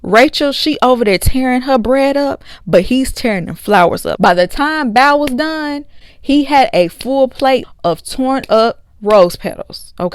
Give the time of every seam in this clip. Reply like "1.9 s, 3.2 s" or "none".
7.7 s